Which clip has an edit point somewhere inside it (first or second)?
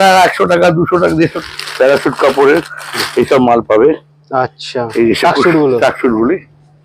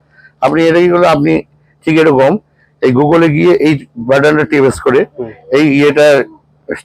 first